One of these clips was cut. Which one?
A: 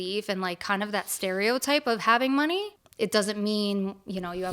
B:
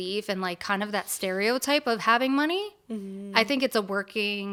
A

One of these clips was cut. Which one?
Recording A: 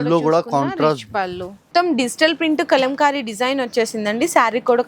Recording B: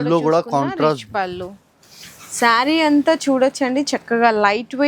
A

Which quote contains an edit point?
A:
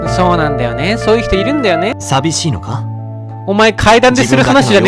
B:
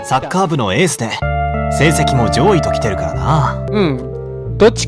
B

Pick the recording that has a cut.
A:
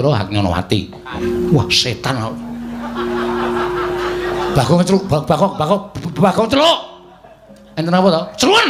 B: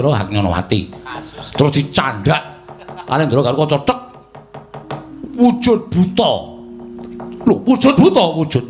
A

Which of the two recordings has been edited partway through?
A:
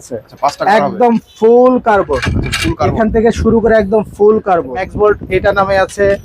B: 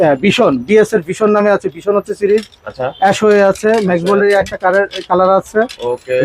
A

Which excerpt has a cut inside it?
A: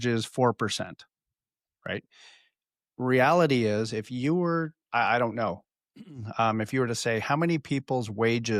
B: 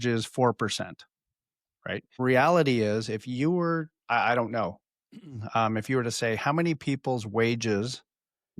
B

